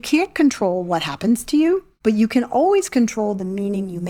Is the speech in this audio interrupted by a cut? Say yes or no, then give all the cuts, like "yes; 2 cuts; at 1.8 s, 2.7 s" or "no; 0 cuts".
yes; 1 cut; at 1.9 s